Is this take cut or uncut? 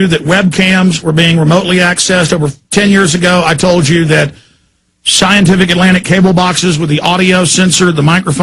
uncut